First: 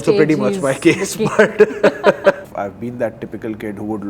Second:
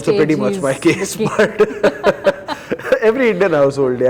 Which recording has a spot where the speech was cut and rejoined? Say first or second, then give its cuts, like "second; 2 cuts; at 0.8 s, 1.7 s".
first; 1 cut; at 2.5 s